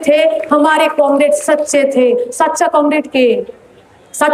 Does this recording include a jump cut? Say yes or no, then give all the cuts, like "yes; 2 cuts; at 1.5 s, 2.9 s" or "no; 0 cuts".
no; 0 cuts